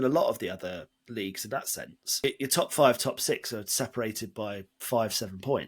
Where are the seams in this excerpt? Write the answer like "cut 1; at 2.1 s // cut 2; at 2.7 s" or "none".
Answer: cut 1; at 2.2 s